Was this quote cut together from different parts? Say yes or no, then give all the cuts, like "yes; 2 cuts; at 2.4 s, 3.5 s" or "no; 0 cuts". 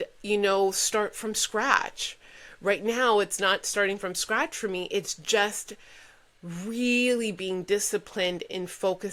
no; 0 cuts